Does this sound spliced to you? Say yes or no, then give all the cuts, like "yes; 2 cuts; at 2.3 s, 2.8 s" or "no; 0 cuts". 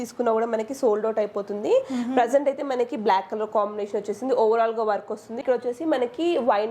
yes; 1 cut; at 5.4 s